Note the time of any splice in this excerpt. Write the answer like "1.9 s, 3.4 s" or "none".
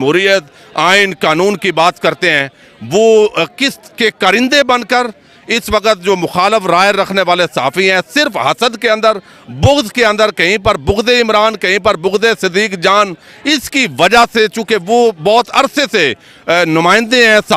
none